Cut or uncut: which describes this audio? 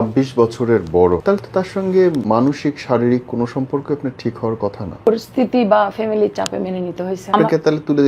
cut